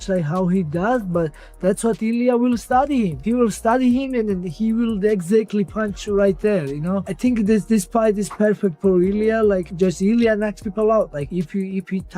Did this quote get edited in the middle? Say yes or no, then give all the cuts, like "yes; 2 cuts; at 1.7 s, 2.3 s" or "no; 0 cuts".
yes; 4 cuts; at 3.2 s, 7.1 s, 9.7 s, 11.2 s